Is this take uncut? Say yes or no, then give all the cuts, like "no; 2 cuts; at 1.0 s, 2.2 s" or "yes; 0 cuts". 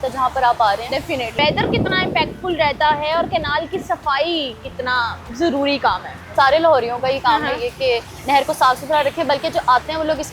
no; 2 cuts; at 1.4 s, 6.2 s